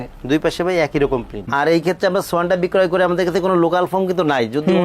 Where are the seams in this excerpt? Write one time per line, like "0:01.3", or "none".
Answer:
0:01.5

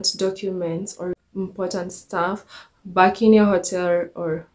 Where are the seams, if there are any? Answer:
0:01.1

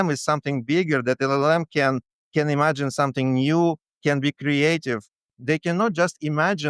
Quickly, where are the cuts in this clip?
0:05.3

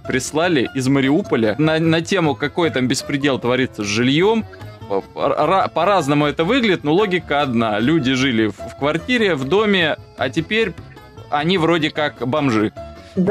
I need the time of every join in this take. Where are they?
none

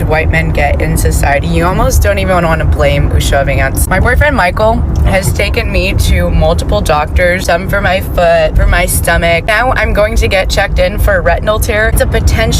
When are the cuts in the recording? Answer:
none

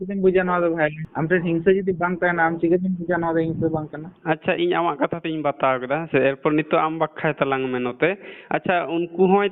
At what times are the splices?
0:01.1

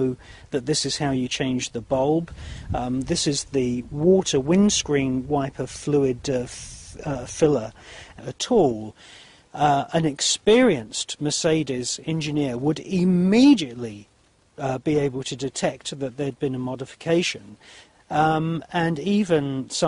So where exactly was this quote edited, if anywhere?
none

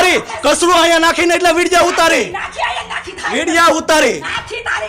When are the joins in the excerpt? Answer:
none

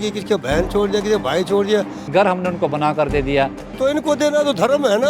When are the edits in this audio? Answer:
0:02.0
0:03.6

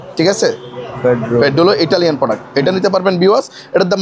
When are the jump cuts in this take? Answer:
none

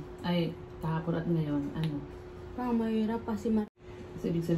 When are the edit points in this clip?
0:03.6

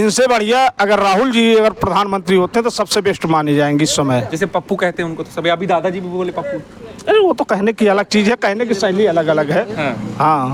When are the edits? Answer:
none

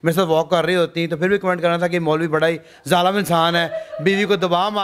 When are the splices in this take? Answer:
none

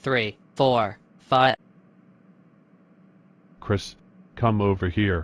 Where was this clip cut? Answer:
0:01.6
0:03.6

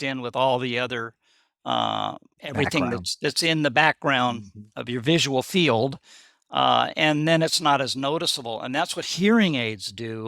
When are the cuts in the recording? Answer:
0:02.3

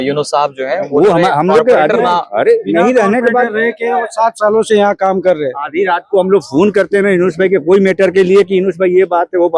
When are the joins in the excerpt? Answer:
none

